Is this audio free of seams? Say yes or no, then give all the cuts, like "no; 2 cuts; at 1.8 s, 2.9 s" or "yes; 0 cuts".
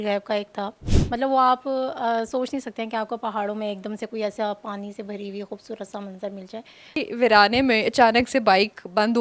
no; 2 cuts; at 0.9 s, 7.1 s